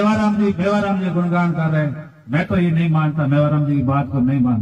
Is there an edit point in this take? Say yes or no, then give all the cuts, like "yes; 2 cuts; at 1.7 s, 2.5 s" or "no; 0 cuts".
no; 0 cuts